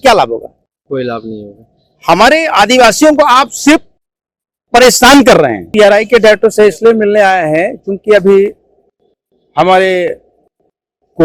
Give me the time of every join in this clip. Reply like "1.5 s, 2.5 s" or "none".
5.7 s